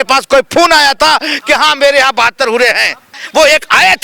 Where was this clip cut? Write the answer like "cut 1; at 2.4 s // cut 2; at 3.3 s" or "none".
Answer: cut 1; at 3.1 s